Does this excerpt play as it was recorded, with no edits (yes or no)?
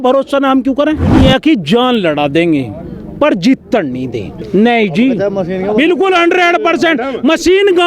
no